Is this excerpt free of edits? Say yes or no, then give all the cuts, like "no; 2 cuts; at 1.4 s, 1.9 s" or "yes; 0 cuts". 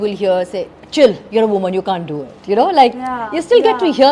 yes; 0 cuts